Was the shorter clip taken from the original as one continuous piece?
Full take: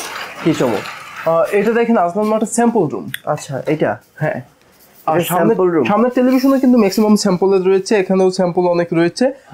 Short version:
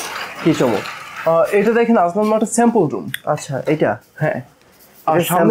yes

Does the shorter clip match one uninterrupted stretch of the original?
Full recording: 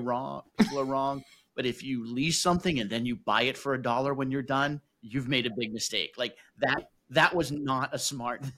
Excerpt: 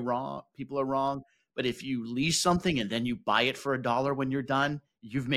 yes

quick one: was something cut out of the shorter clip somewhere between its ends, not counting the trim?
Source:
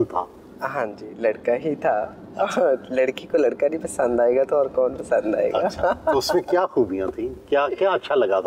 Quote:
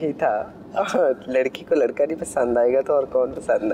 no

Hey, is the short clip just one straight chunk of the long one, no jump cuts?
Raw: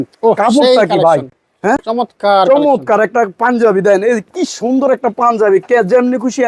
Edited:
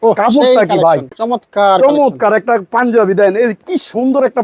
no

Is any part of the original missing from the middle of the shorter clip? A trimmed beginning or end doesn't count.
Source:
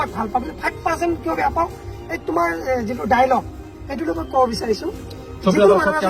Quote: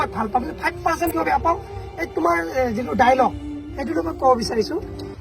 yes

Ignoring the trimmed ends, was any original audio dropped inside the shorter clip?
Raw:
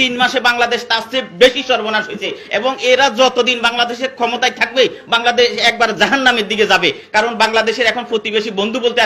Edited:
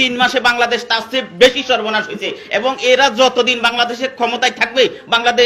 no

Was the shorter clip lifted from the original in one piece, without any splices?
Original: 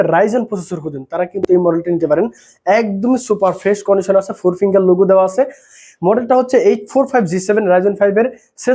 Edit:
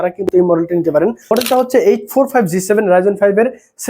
no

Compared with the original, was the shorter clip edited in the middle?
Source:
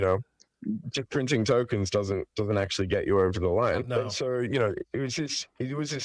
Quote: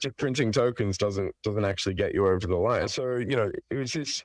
yes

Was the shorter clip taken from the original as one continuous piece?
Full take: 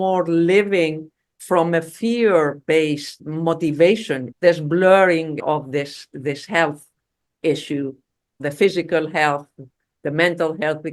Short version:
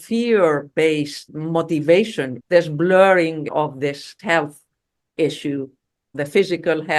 no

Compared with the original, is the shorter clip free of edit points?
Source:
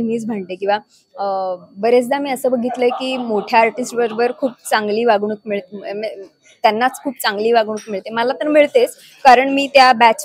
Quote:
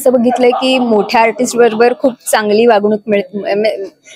yes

